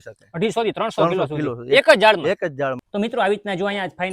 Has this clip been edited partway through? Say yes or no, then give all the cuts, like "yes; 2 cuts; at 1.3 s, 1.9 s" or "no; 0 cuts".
yes; 1 cut; at 2.8 s